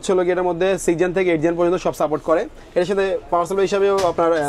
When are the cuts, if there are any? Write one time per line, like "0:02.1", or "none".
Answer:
none